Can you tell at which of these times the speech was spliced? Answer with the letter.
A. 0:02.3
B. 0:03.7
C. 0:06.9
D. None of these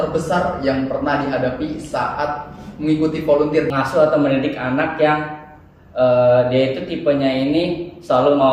B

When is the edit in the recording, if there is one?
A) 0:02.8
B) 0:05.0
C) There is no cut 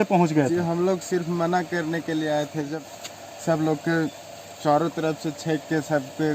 A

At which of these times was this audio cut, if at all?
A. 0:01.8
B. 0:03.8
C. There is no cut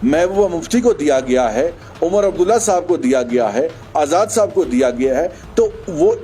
C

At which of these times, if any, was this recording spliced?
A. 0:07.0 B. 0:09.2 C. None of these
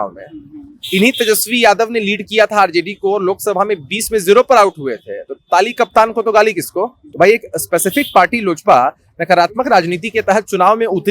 A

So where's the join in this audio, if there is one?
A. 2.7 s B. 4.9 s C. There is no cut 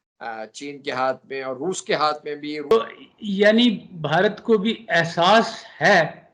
A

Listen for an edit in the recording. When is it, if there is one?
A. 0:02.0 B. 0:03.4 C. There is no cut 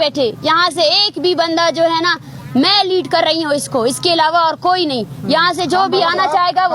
C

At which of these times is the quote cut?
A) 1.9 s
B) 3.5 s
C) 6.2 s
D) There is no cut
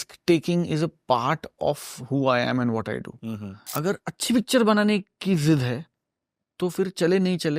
B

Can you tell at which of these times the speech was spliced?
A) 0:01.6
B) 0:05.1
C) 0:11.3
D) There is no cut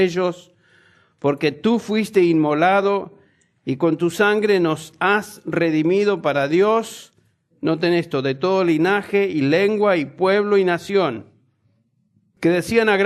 A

